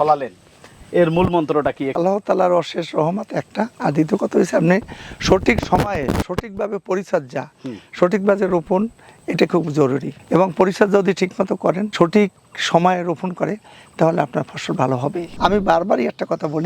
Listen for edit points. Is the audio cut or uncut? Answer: cut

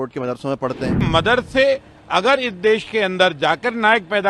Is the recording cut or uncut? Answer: cut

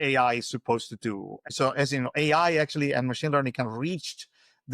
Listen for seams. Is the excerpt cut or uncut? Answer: cut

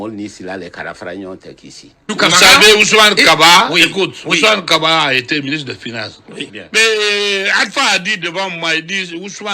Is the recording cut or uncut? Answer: cut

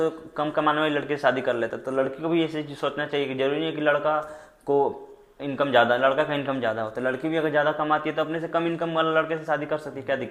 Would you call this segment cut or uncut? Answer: uncut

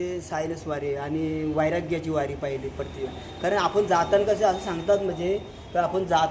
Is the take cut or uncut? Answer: uncut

